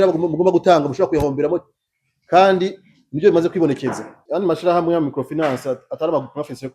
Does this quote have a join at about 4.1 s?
yes; 1 cut; at 4.1 s

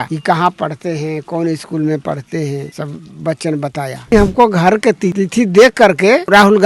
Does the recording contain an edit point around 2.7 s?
yes; 2 cuts; at 2.7 s, 4.1 s

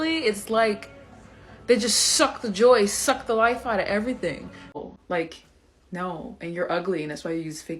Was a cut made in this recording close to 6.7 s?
no; 2 cuts; at 0.8 s, 4.8 s

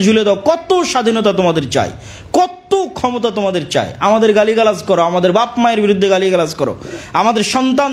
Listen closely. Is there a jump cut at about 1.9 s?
no; 0 cuts

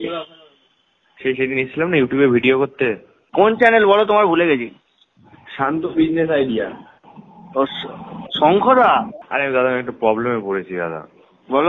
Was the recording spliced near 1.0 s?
no; 2 cuts; at 3.2 s, 9.2 s

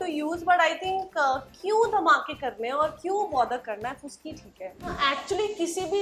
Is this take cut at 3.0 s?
no; 1 cut; at 5.0 s

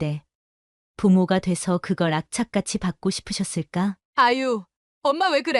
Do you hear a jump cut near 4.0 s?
yes; 1 cut; at 4.0 s

